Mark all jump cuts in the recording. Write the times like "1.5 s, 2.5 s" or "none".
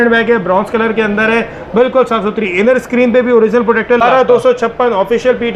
4.0 s

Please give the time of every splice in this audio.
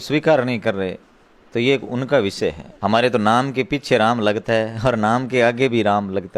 2.7 s

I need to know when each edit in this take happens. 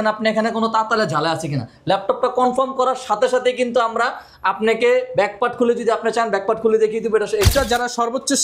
7.5 s

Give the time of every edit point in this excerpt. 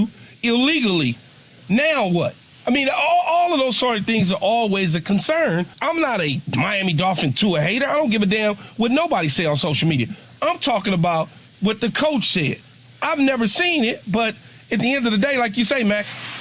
5.7 s

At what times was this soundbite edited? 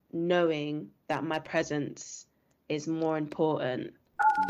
none

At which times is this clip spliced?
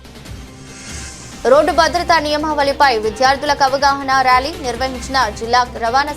none

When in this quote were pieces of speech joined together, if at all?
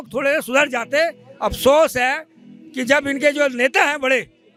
none

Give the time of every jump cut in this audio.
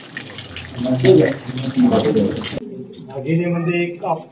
2.5 s

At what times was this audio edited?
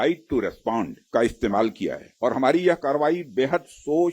1.0 s, 2.1 s

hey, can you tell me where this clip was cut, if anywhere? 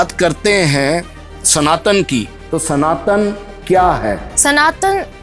4.3 s

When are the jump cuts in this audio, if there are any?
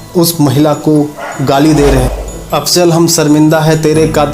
2.1 s

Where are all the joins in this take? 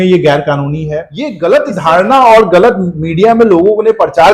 1.4 s

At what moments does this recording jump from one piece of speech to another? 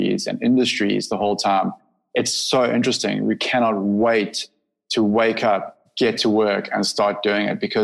5.8 s

